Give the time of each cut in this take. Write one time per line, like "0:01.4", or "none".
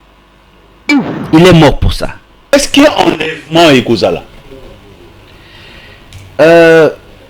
0:02.5